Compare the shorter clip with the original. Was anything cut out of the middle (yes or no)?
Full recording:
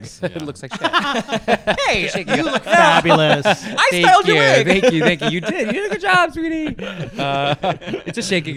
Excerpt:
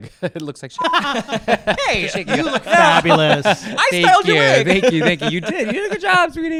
no